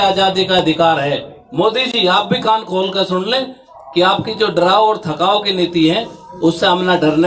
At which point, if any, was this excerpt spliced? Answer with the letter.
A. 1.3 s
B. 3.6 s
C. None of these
A